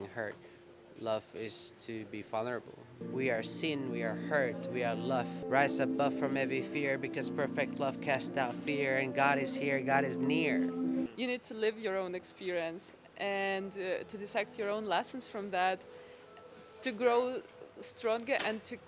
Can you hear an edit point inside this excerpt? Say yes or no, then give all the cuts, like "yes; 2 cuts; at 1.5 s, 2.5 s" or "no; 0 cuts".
yes; 2 cuts; at 3.0 s, 11.1 s